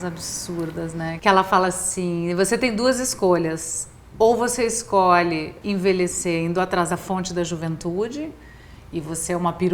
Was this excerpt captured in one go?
no; 2 cuts; at 1.1 s, 5.5 s

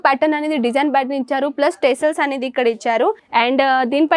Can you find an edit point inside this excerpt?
yes; 1 cut; at 3.2 s

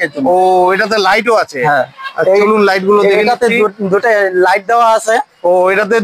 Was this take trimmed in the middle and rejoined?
no; 0 cuts

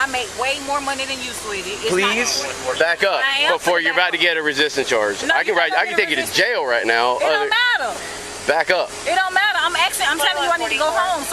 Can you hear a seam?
no; 0 cuts

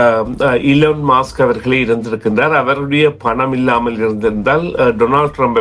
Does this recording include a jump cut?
no; 0 cuts

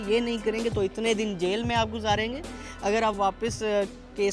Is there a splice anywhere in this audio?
no; 0 cuts

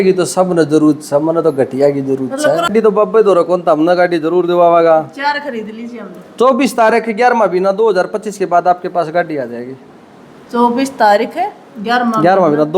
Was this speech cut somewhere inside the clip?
yes; 1 cut; at 2.6 s

